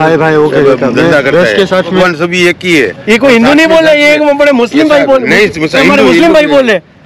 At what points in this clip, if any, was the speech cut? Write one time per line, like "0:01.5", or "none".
0:02.0